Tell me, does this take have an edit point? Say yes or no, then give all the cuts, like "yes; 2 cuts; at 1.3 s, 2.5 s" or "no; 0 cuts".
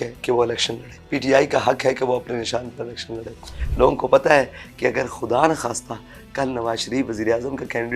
yes; 2 cuts; at 0.9 s, 3.6 s